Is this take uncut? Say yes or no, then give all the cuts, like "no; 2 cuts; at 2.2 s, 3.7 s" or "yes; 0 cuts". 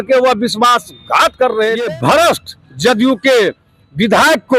no; 1 cut; at 1.8 s